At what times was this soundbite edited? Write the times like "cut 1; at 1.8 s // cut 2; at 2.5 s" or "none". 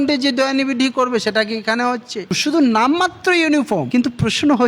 cut 1; at 2.4 s